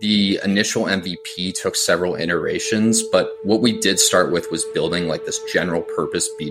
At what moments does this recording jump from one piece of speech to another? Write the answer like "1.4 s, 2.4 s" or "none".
none